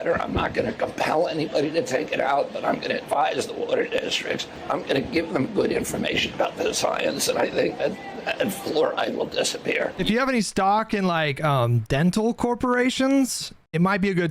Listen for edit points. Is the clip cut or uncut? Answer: cut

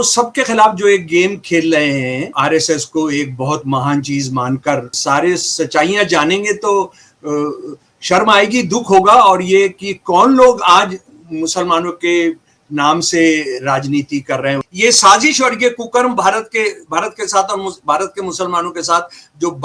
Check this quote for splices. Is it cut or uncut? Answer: cut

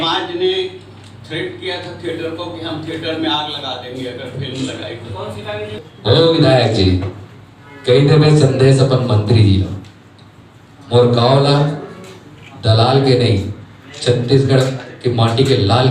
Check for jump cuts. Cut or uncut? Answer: cut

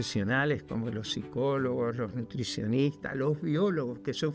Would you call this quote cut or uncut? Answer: uncut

